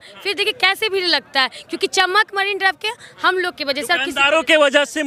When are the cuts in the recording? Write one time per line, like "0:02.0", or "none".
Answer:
none